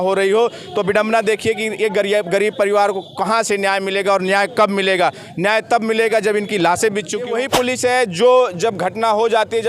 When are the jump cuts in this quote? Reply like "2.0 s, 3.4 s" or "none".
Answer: 7.3 s